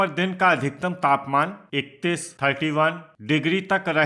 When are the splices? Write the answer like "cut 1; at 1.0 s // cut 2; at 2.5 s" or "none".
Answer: cut 1; at 1.6 s // cut 2; at 3.1 s